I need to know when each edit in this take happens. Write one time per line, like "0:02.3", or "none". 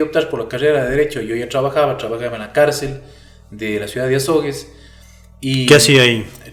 none